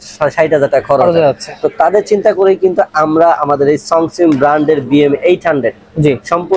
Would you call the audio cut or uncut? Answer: uncut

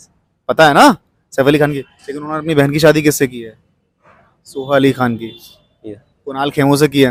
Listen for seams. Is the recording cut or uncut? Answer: uncut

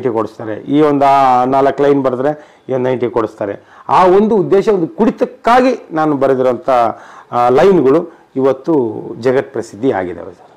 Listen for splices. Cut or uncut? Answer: uncut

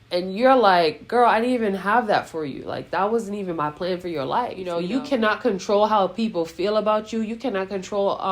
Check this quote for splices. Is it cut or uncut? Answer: cut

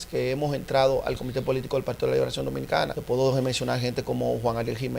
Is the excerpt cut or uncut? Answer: cut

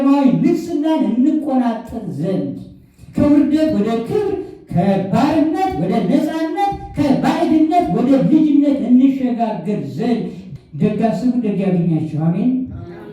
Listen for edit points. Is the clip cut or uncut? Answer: cut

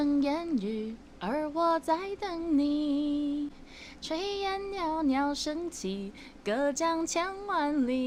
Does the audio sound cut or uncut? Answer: uncut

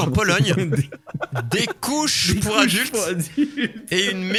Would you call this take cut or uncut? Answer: uncut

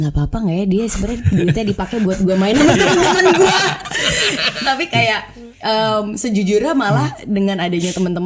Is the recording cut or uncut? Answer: cut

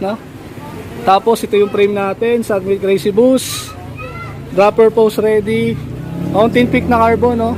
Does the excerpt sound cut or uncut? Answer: uncut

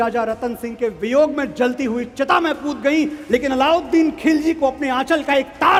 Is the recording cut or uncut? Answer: uncut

